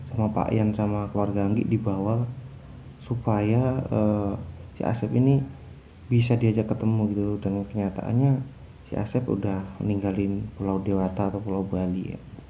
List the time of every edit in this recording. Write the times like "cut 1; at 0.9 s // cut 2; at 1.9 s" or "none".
none